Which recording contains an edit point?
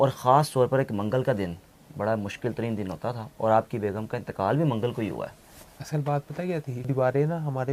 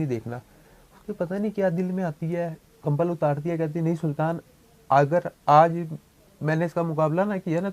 first; 1 cut; at 6.7 s

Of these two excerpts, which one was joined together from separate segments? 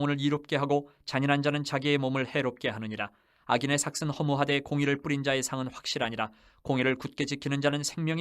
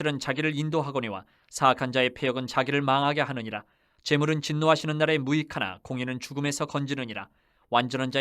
second; 1 cut; at 1.9 s

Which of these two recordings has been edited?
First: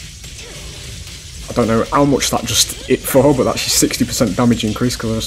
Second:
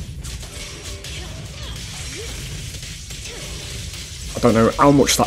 second; 1 cut; at 1.5 s

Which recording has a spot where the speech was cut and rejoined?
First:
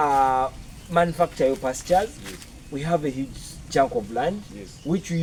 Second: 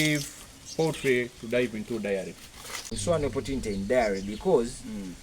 second; 1 cut; at 3.0 s

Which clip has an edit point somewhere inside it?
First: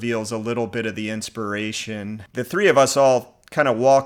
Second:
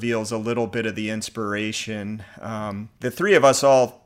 first; 1 cut; at 2.3 s

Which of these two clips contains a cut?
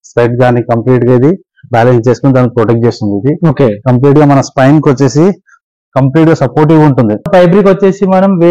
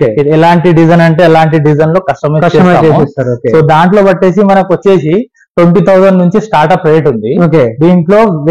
first; 1 cut; at 7.3 s

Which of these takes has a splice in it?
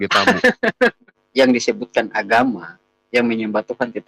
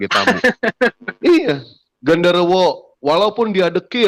first; 1 cut; at 1.1 s

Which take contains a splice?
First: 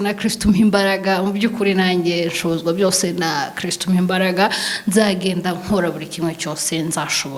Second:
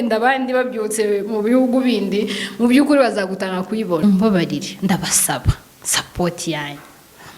second; 1 cut; at 4.0 s

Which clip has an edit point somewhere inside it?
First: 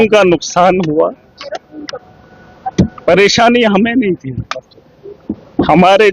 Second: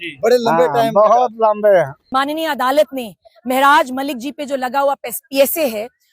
second; 1 cut; at 2.0 s

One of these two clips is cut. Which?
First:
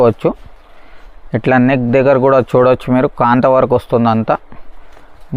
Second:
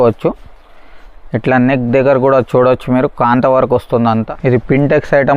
second; 1 cut; at 4.3 s

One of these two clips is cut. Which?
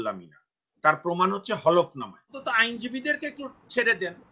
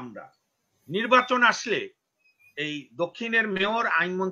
first; 1 cut; at 2.3 s

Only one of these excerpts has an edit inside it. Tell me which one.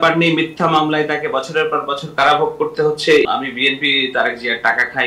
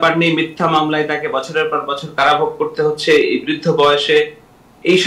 first; 1 cut; at 3.3 s

